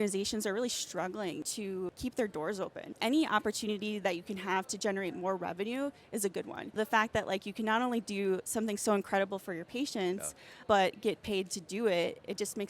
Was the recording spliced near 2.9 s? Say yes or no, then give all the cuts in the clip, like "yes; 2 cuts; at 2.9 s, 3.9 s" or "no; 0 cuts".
yes; 4 cuts; at 1.6 s, 2.9 s, 6.8 s, 10.6 s